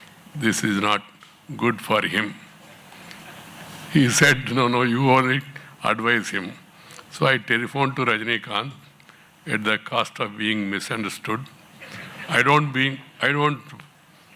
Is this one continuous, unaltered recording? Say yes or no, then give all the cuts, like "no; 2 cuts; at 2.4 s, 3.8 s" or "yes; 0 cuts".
yes; 0 cuts